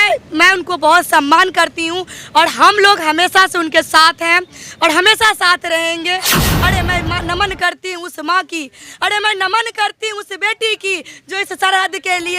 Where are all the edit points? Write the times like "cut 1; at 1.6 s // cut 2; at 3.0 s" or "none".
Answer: cut 1; at 6.5 s